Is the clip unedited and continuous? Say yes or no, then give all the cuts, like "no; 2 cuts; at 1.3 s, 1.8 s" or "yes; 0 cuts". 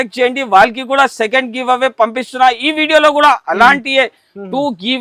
yes; 0 cuts